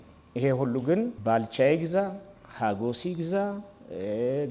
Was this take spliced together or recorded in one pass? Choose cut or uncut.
cut